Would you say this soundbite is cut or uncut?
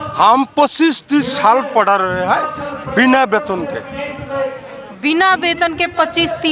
uncut